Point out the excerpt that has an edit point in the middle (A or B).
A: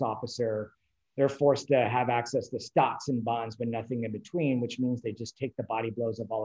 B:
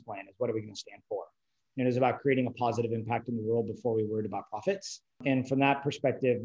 B